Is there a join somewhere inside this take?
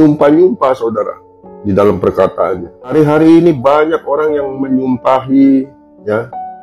yes; 1 cut; at 2.9 s

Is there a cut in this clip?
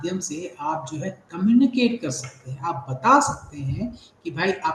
no; 0 cuts

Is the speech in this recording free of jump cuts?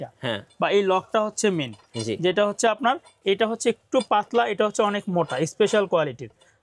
yes; 0 cuts

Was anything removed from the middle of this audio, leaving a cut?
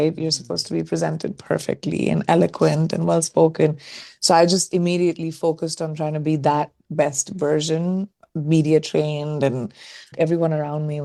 no; 0 cuts

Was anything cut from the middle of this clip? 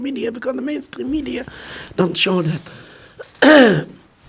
no; 0 cuts

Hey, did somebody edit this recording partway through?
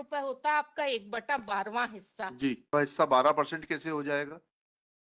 yes; 1 cut; at 2.7 s

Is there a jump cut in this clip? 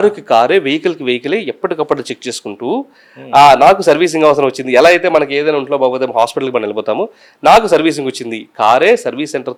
no; 0 cuts

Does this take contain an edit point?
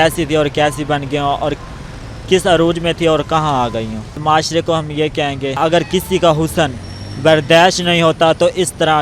yes; 2 cuts; at 4.2 s, 5.6 s

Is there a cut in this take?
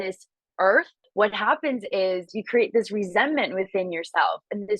yes; 2 cuts; at 1.0 s, 2.3 s

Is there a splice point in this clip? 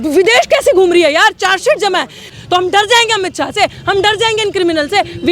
yes; 1 cut; at 2.3 s

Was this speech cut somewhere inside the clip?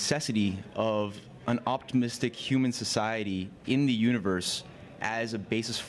no; 0 cuts

